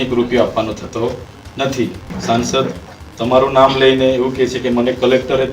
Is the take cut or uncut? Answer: cut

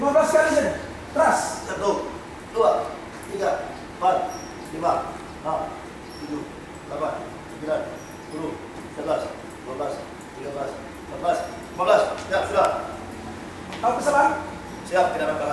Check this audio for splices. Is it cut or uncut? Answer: uncut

